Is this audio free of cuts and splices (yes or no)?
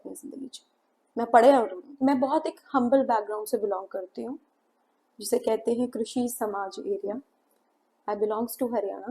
no